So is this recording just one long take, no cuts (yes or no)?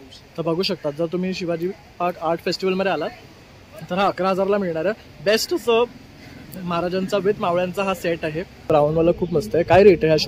no